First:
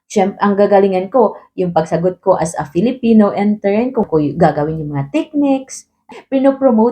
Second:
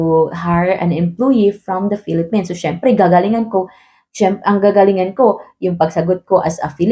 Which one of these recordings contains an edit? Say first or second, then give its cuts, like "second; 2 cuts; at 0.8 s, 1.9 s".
first; 2 cuts; at 4.1 s, 6.1 s